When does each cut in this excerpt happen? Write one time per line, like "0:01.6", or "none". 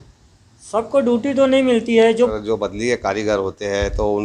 0:02.3